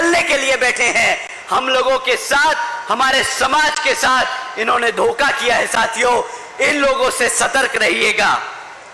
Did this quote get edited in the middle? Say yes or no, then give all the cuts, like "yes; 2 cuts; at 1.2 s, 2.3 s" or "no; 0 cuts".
no; 0 cuts